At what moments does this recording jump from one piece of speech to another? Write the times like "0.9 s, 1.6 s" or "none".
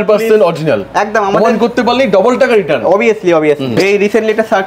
3.8 s